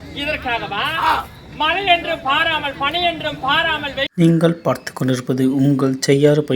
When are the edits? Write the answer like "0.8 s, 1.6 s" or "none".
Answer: 4.1 s